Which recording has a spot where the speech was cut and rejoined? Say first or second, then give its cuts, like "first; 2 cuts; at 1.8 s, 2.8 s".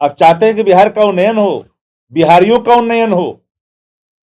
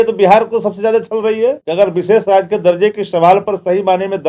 second; 1 cut; at 1.6 s